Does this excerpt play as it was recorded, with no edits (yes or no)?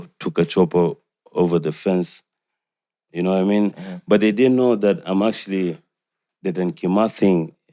yes